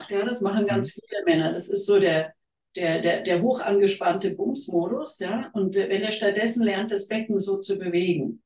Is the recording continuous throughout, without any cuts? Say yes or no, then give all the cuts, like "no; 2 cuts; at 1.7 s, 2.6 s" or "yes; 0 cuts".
yes; 0 cuts